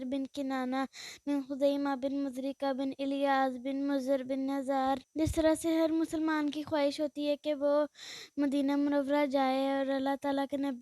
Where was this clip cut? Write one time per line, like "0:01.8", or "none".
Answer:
0:05.1